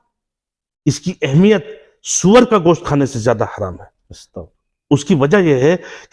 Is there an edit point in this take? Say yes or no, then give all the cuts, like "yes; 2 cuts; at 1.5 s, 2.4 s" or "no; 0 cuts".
no; 0 cuts